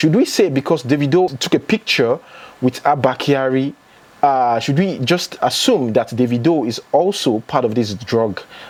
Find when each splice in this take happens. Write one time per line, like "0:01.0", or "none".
none